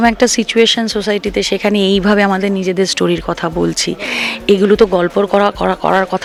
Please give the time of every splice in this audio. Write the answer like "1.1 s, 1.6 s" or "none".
none